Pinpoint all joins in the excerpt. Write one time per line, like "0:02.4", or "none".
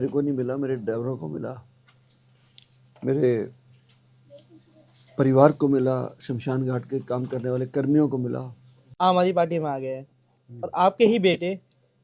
0:08.9